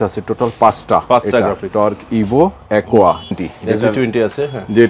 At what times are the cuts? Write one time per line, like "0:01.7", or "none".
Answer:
0:03.4

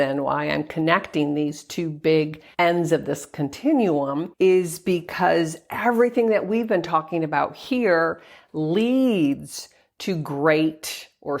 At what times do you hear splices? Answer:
0:02.4
0:04.3

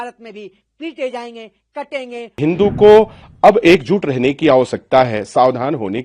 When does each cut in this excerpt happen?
0:02.4

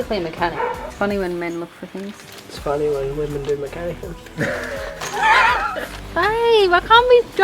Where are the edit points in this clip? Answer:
0:00.9
0:06.0

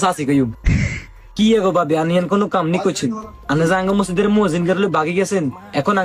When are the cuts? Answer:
none

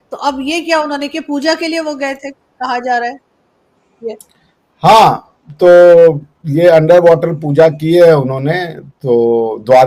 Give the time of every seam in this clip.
none

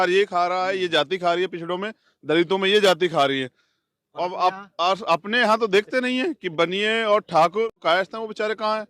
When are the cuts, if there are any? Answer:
0:07.7

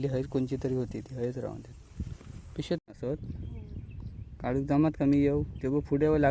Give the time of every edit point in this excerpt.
0:02.8

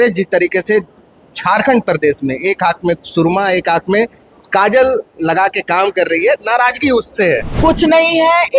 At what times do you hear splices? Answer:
0:07.5

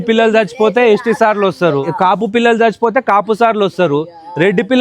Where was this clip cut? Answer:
0:01.9

